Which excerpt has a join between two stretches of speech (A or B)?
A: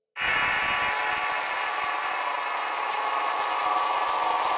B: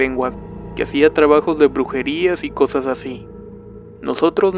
A